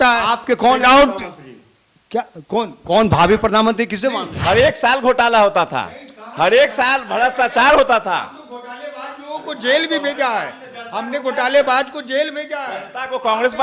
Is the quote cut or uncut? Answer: cut